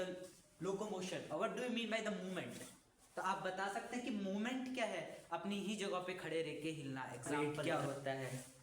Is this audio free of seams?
no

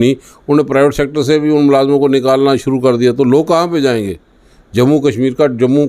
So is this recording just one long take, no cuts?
yes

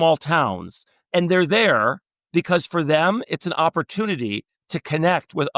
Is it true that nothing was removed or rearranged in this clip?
no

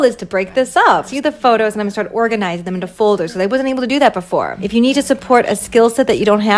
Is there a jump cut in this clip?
yes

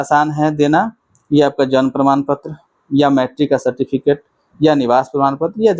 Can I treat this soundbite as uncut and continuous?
yes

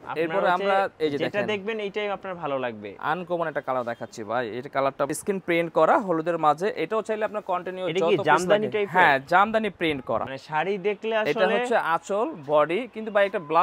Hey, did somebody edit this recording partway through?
yes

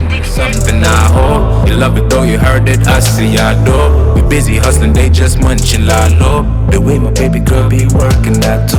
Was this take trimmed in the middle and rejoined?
no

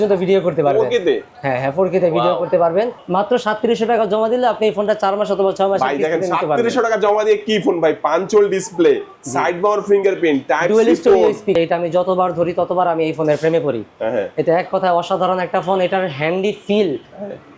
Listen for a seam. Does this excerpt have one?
yes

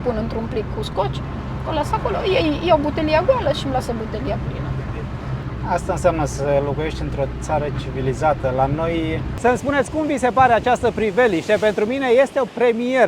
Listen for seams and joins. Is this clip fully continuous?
no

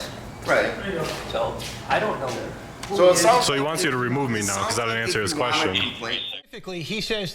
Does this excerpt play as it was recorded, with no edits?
no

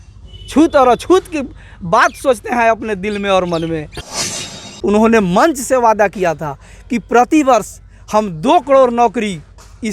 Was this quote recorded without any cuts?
no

